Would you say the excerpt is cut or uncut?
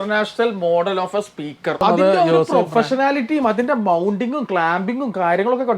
cut